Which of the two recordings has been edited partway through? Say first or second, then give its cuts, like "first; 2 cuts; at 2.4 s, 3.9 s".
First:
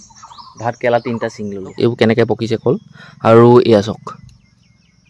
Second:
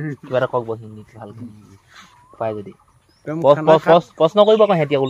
first; 1 cut; at 1.8 s